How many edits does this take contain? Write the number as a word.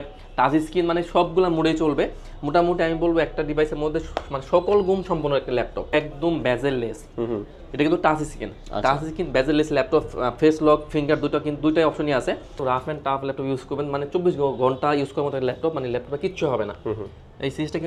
two